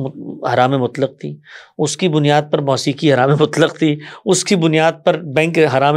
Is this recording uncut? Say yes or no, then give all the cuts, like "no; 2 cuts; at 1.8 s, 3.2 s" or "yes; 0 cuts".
yes; 0 cuts